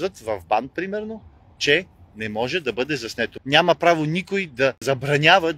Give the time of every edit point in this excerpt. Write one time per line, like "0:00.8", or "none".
0:03.3